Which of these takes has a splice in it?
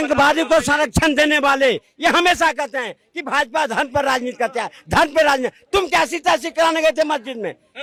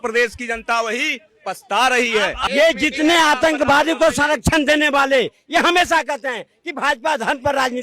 second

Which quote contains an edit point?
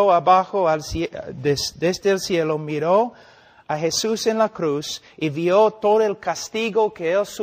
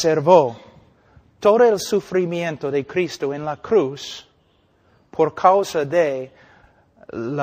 first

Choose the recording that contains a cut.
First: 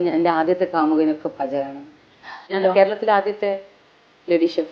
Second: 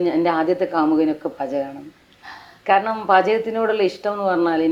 first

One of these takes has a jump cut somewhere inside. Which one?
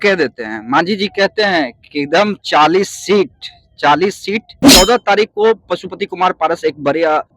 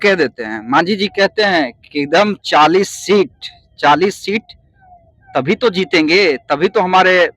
first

